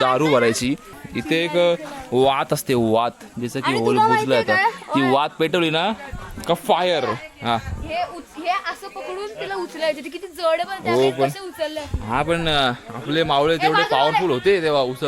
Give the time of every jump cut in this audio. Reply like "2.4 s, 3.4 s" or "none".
1.0 s